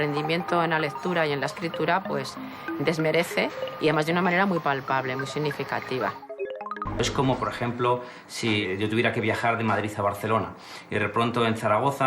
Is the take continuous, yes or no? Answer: no